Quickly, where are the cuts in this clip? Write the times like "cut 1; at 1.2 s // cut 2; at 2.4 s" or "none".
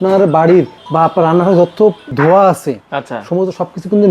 cut 1; at 2.0 s